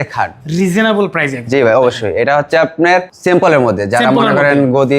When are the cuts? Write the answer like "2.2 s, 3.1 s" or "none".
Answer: 3.1 s